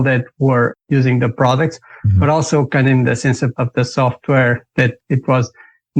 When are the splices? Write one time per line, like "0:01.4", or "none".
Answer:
none